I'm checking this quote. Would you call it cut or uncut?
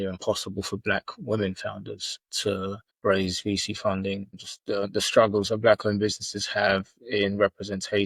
cut